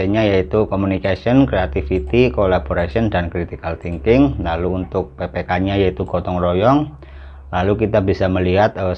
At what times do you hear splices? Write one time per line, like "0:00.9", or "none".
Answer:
none